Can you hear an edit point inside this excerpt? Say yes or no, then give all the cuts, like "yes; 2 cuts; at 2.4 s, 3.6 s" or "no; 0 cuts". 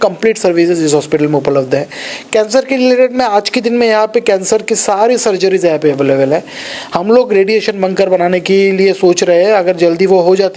no; 0 cuts